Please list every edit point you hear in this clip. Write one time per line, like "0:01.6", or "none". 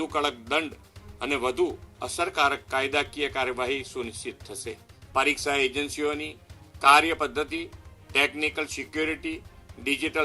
0:04.9